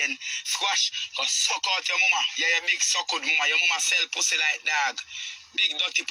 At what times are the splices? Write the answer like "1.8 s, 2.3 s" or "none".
none